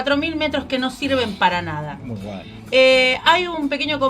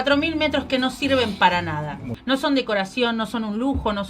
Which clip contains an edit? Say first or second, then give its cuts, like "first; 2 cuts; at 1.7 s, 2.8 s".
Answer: second; 1 cut; at 2.1 s